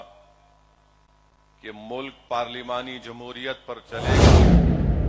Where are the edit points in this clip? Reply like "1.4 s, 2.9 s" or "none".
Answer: 3.9 s